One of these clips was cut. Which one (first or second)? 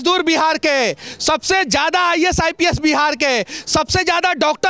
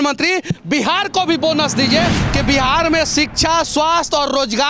second